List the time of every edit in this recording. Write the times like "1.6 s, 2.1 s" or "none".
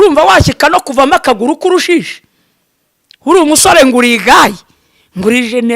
none